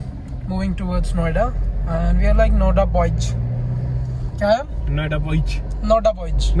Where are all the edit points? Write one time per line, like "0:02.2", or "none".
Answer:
none